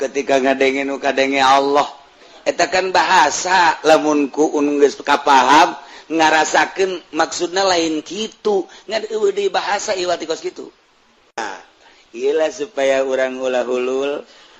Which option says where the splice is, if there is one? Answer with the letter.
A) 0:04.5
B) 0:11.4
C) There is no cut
B